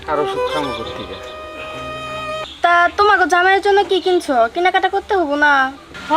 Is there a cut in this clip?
yes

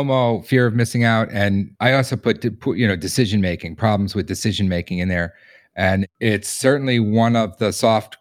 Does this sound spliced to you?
yes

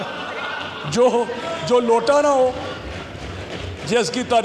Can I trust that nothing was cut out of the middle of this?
yes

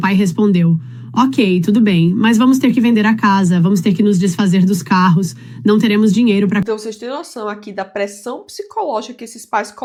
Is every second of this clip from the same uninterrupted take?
yes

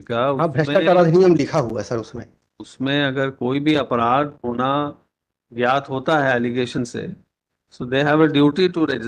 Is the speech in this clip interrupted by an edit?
no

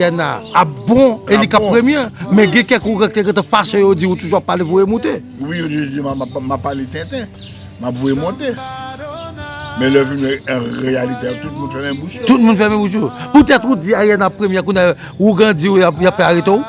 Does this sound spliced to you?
no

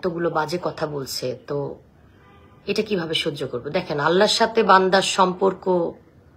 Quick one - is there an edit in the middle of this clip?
no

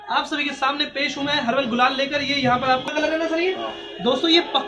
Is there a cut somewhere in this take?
yes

